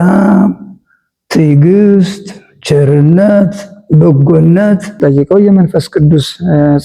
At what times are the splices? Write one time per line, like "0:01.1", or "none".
0:05.0